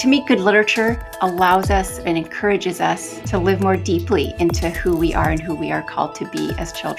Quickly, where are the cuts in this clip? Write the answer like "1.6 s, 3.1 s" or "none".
1.1 s, 3.1 s